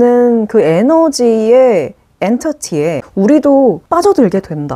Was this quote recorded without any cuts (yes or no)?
no